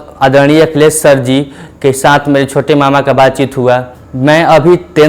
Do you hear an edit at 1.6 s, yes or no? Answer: no